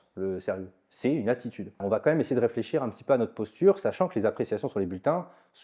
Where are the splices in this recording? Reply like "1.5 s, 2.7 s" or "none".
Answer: 1.8 s

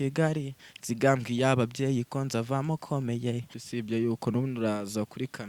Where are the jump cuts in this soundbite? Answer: 3.6 s

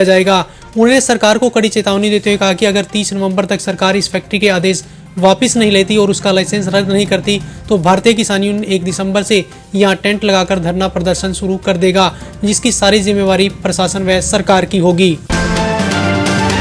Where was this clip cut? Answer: 15.2 s

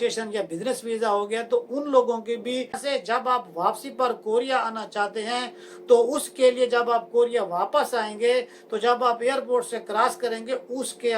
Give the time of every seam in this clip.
2.8 s

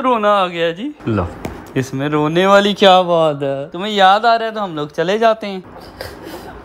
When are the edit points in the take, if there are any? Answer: 1.0 s

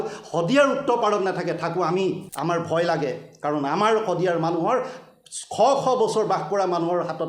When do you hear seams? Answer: 2.3 s

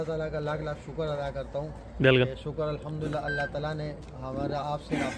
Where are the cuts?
none

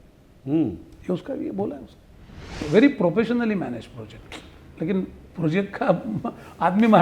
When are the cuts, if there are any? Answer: 2.5 s

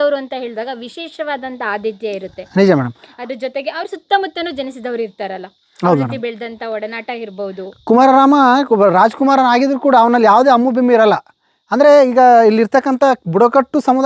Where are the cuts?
none

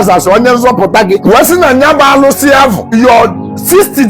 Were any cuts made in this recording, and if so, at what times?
1.2 s, 2.8 s

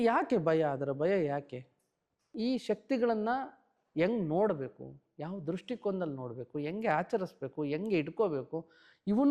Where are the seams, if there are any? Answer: 2.2 s

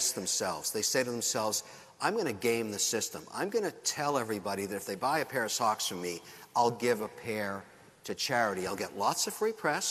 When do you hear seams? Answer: none

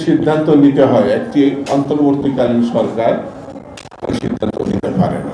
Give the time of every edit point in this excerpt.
none

